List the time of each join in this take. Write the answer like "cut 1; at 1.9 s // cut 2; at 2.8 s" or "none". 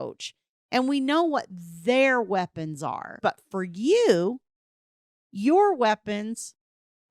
cut 1; at 3.1 s